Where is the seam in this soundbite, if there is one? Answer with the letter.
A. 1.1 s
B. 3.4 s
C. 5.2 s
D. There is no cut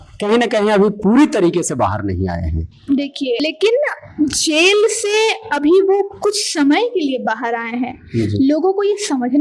B